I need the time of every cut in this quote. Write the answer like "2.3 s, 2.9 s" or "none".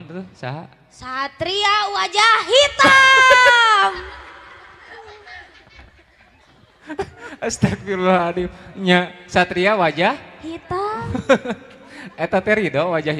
none